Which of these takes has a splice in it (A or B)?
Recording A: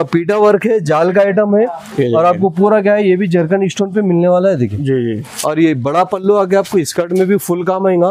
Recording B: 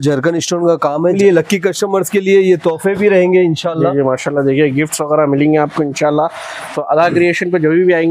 B